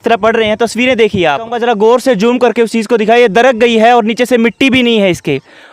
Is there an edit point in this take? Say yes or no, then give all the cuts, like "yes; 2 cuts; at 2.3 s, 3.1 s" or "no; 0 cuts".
yes; 1 cut; at 1.5 s